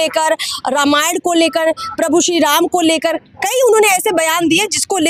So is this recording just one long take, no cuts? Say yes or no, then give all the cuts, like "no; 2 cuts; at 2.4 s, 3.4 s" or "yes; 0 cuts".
yes; 0 cuts